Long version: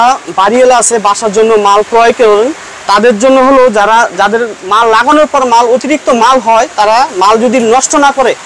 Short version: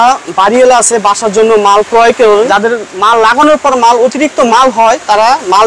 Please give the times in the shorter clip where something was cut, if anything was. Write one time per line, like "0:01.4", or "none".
0:02.5